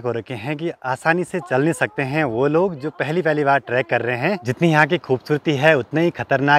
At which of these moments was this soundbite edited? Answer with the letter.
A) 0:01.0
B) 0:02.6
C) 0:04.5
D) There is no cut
C